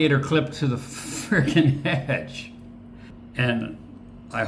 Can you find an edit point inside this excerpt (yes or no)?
yes